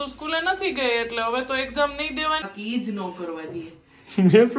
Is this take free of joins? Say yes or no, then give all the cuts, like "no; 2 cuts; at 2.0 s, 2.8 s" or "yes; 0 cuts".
no; 1 cut; at 2.5 s